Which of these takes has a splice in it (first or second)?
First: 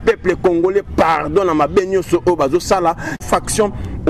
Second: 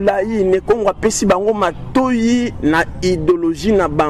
first